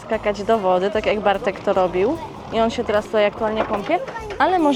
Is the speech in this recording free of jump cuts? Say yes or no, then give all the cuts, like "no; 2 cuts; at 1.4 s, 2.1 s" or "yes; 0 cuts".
yes; 0 cuts